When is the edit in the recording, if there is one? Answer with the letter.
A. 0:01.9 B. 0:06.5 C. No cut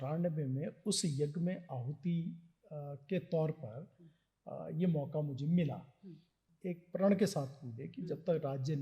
B